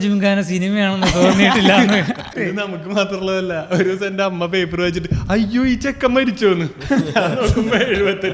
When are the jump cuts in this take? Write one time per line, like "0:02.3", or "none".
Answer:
0:02.3

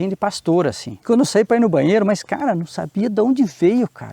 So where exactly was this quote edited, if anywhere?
0:01.0

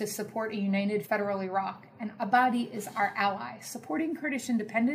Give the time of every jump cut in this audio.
0:01.0

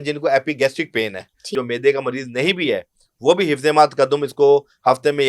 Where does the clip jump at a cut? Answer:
0:01.5

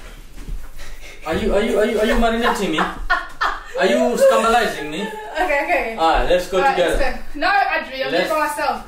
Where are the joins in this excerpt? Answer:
none

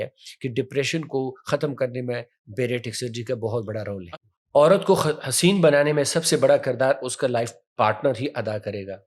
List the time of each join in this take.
0:04.0

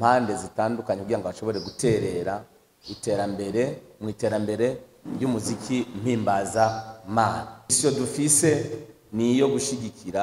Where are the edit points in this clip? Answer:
0:07.8

